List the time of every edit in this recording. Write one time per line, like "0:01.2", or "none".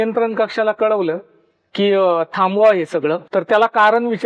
0:03.2